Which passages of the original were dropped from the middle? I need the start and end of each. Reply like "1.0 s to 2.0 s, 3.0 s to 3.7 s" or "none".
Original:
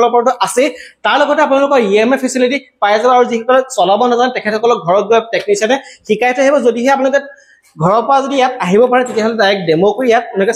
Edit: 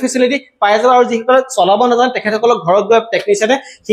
none